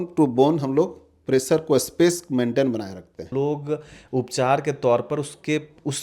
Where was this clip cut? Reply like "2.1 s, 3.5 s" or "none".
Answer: 3.2 s